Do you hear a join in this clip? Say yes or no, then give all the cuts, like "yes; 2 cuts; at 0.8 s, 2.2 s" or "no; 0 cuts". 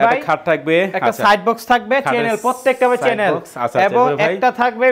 no; 0 cuts